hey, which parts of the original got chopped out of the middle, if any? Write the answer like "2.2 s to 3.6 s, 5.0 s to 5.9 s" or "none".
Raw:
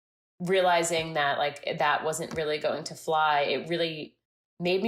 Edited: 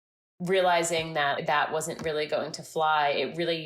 1.4 s to 1.7 s